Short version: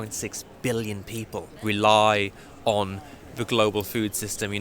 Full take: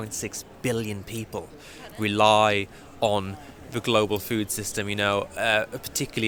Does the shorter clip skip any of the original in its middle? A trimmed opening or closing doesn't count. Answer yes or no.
yes